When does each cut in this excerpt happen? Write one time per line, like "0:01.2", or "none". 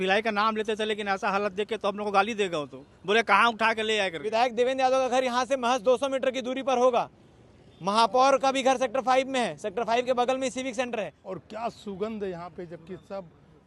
0:04.2
0:11.2